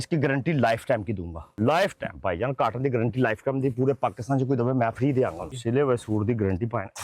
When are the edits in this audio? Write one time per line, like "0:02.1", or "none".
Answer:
0:01.5
0:05.5